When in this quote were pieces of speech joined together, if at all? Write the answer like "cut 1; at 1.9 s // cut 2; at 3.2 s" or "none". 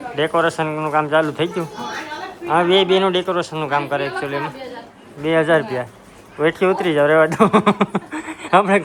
none